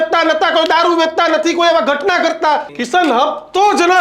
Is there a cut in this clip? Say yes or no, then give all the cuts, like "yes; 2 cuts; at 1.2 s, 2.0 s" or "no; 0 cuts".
yes; 1 cut; at 2.7 s